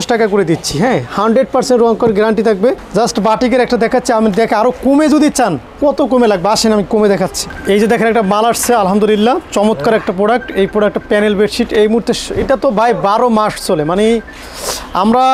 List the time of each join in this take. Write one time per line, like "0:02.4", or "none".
0:02.8
0:07.5